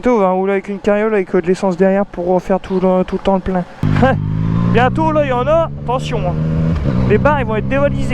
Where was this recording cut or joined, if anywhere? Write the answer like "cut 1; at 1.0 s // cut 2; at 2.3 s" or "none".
cut 1; at 3.8 s